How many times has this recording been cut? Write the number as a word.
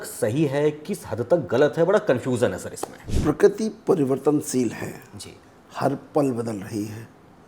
one